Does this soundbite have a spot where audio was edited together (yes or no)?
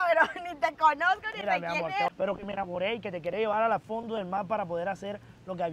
yes